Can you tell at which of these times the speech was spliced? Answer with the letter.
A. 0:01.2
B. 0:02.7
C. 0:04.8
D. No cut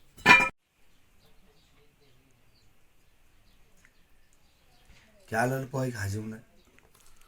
C